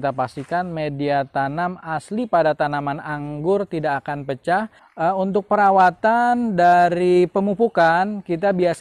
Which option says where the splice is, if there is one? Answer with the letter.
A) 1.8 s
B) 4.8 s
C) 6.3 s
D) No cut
B